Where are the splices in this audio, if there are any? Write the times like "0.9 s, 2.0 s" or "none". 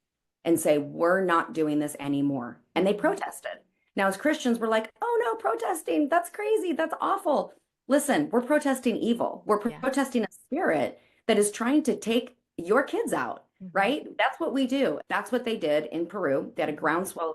15.0 s